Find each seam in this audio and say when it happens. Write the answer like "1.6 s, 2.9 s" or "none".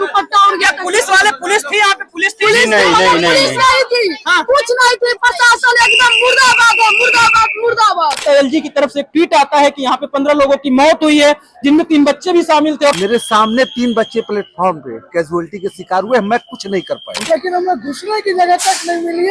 8.2 s, 13.0 s, 17.2 s